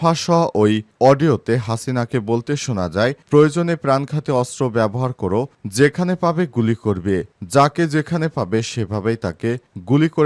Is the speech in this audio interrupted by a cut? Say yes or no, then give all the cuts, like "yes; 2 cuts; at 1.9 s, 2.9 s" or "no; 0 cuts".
no; 0 cuts